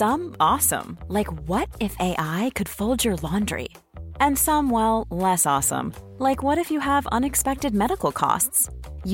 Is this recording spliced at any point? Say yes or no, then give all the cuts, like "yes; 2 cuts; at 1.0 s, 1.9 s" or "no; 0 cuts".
no; 0 cuts